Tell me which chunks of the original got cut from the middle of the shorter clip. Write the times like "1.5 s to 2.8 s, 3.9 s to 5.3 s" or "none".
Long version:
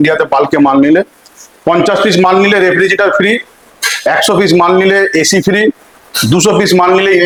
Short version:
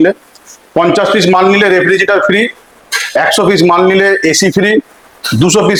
none

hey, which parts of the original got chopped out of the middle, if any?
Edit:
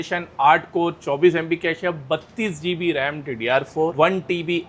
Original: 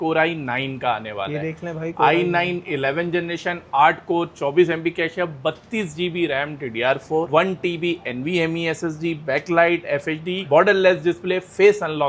none

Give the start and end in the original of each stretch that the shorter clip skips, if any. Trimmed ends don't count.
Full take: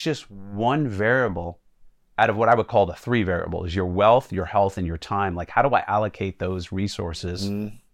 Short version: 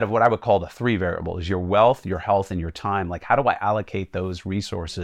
none

